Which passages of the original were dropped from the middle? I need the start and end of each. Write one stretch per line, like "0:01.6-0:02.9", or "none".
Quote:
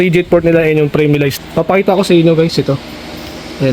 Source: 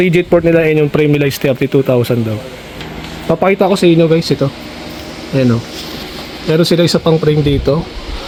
0:01.4-0:03.1